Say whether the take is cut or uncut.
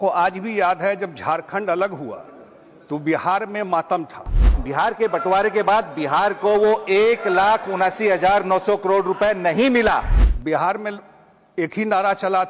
cut